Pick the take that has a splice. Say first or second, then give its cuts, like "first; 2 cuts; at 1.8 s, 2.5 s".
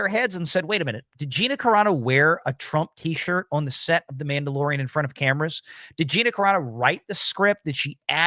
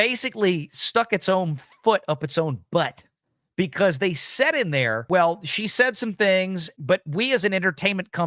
second; 1 cut; at 5.0 s